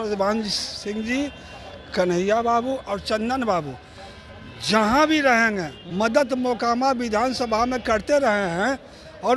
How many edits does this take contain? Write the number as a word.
one